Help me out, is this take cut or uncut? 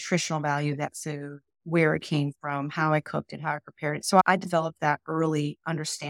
cut